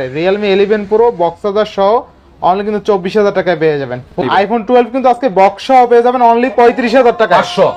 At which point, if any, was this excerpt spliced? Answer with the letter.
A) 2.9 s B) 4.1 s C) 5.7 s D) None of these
B